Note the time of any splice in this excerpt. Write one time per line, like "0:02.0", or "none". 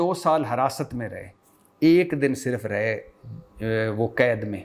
none